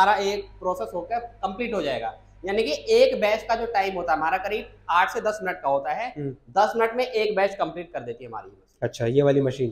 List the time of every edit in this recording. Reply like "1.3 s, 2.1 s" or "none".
none